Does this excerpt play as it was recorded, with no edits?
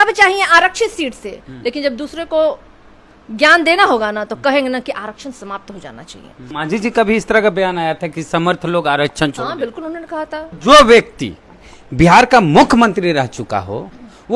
no; 2 cuts; at 6.5 s, 10.5 s

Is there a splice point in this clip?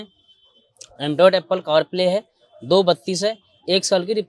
no; 0 cuts

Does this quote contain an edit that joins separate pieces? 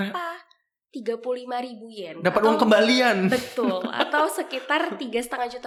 no; 0 cuts

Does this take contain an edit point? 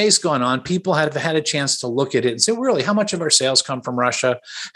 no; 0 cuts

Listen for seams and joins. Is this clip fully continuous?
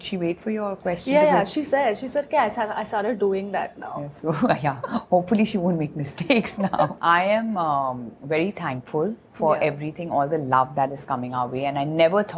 no; 1 cut; at 6.9 s

